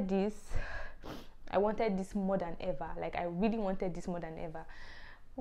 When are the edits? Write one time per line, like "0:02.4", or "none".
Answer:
none